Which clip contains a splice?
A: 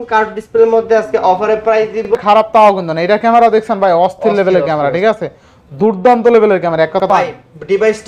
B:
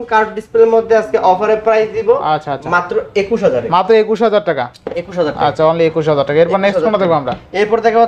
A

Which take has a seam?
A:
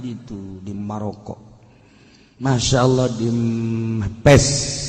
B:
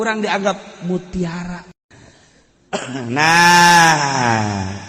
B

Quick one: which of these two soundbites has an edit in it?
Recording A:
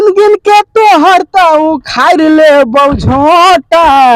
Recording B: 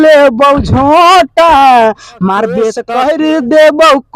B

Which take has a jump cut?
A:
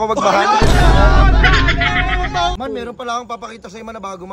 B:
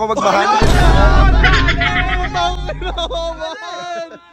A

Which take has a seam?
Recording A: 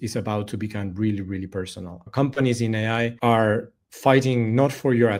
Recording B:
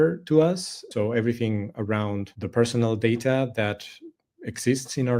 B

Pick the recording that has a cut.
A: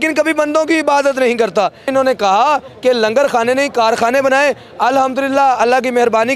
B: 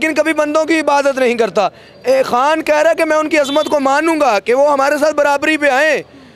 A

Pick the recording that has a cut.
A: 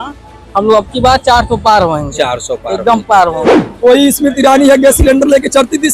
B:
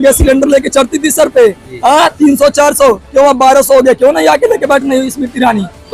A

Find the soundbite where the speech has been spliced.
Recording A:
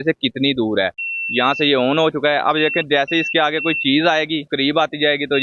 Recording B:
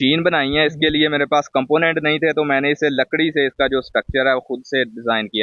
A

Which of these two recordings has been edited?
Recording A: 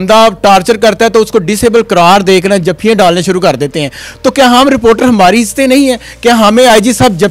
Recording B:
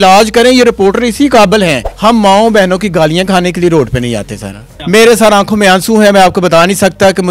B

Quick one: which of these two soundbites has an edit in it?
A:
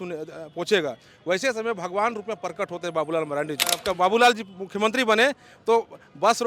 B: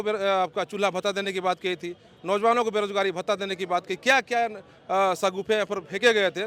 A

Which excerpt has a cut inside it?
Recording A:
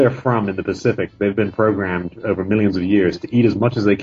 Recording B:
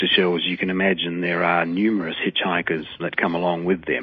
B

